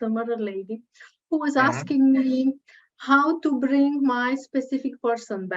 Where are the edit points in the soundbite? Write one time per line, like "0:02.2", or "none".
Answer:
none